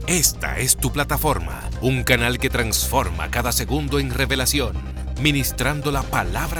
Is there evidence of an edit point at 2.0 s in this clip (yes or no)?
no